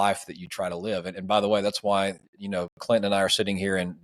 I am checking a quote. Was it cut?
no; 0 cuts

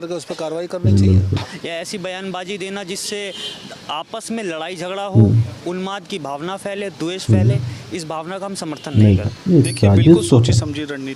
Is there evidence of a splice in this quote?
yes; 2 cuts; at 1.4 s, 9.3 s

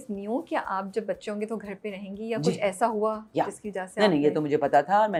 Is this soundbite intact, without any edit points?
yes; 0 cuts

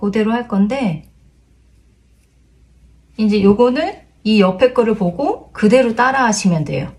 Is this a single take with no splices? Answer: yes; 0 cuts

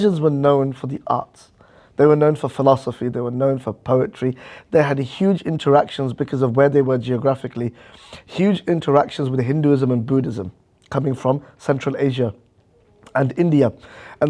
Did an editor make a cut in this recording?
no; 0 cuts

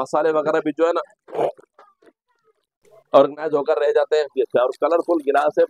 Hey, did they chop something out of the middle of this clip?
yes; 1 cut; at 4.3 s

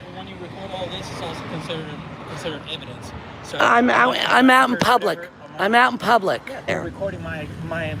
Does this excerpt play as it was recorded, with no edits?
no; 1 cut; at 6.7 s

